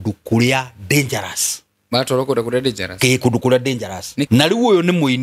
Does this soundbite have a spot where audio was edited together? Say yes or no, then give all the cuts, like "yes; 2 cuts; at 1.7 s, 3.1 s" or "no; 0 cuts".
yes; 1 cut; at 4.3 s